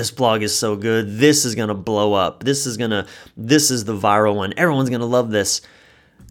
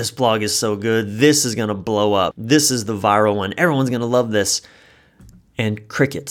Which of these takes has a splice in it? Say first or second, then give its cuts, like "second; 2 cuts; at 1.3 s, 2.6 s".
second; 1 cut; at 2.4 s